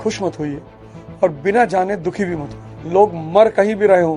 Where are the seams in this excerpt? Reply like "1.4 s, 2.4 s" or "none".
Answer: 2.8 s